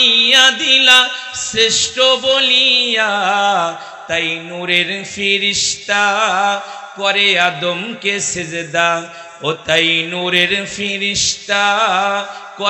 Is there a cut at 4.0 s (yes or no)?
no